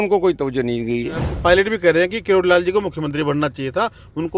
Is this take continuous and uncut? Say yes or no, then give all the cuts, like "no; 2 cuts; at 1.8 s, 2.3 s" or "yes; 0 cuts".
no; 1 cut; at 1.3 s